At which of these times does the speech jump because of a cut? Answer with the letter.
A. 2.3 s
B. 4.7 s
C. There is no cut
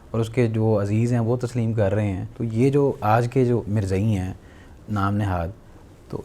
A